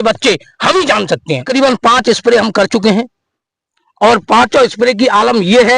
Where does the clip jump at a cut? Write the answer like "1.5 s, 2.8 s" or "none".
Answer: 1.5 s